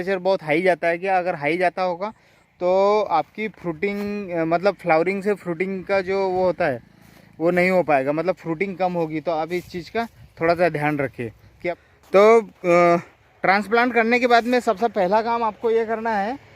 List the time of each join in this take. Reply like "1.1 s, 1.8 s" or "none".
11.9 s